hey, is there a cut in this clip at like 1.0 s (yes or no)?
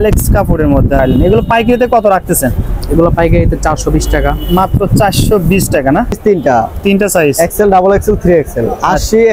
yes